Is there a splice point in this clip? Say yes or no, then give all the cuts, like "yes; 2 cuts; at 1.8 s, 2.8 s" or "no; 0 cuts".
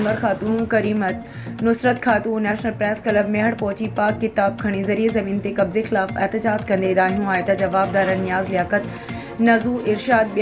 no; 0 cuts